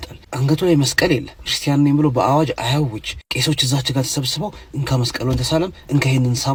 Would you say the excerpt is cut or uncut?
uncut